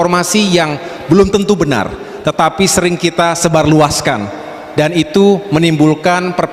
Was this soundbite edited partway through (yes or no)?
no